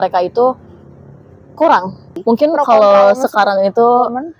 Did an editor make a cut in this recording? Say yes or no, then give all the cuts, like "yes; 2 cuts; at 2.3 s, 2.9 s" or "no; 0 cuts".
yes; 1 cut; at 2.1 s